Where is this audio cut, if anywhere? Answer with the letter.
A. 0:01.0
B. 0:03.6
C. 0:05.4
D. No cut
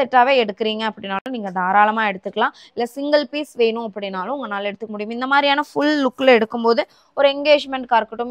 D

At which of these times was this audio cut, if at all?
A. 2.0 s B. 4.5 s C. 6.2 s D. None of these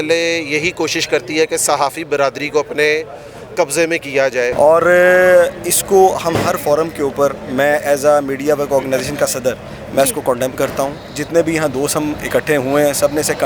B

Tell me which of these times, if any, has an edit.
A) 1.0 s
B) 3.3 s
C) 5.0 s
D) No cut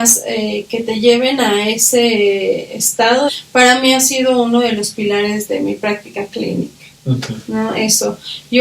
B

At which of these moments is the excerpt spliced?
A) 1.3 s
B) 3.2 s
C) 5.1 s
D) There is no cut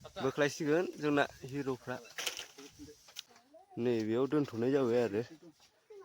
B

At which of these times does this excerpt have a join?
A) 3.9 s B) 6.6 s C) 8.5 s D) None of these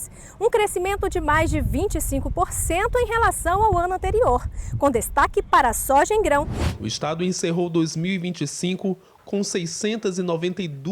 B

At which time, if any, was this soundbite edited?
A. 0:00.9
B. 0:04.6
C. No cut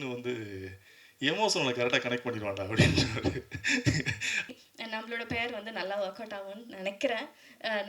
B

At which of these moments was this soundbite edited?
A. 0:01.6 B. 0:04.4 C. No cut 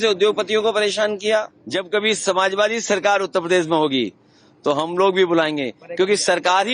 A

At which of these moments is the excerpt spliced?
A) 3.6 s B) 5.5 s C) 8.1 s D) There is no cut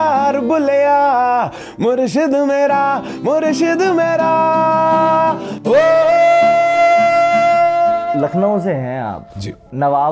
C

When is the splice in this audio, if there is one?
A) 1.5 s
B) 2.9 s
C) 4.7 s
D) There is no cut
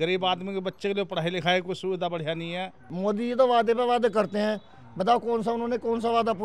B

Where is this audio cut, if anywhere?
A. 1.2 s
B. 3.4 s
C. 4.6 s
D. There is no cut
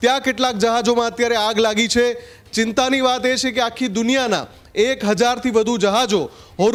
D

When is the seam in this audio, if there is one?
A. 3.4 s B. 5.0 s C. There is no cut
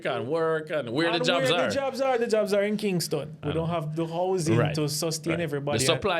A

